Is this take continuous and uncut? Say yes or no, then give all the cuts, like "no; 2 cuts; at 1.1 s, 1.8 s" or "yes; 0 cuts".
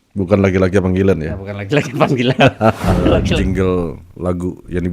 no; 1 cut; at 3.2 s